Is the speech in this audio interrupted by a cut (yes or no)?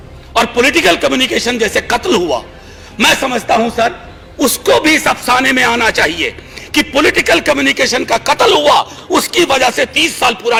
no